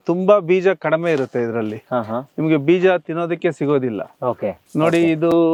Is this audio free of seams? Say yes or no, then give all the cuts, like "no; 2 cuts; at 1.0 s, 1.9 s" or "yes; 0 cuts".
yes; 0 cuts